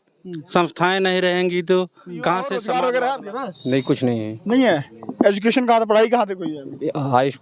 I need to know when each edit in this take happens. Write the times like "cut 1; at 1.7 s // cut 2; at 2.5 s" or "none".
cut 1; at 2.6 s